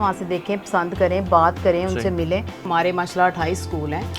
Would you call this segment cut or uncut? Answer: cut